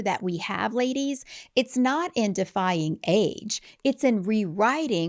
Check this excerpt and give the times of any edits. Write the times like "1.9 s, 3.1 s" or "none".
none